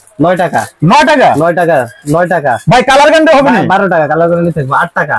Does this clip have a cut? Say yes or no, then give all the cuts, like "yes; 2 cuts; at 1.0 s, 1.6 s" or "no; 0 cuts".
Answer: no; 0 cuts